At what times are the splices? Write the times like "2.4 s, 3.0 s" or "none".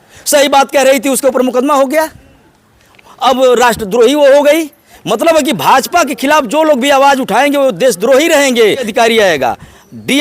8.9 s

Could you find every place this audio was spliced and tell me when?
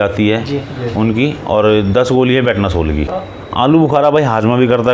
3.7 s

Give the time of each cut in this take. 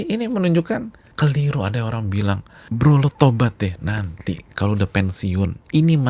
1.0 s, 2.5 s

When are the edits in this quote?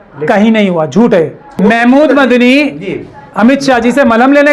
1.6 s

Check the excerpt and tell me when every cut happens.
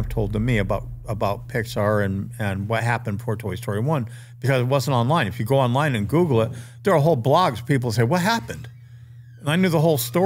none

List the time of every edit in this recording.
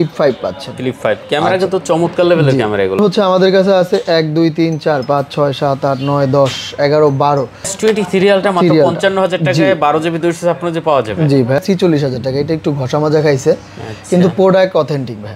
3.0 s, 7.7 s, 11.6 s

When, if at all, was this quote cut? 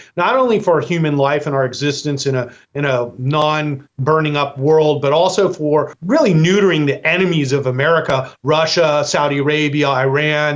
6.0 s

